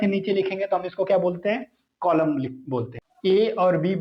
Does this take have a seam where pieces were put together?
yes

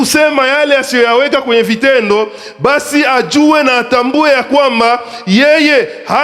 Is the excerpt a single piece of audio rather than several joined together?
yes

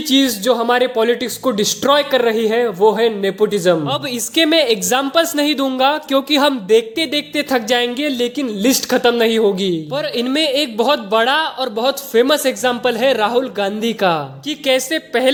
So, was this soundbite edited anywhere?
no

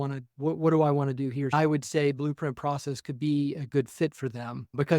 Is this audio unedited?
no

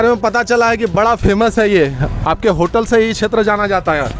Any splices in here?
no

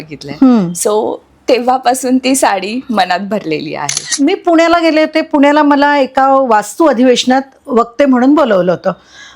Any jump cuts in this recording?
yes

